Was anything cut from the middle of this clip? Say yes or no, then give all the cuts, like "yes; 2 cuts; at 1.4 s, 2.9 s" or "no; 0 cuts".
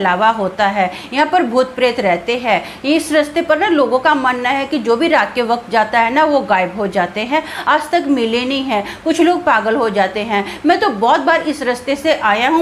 no; 0 cuts